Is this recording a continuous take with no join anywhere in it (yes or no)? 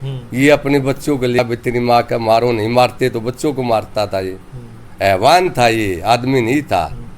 no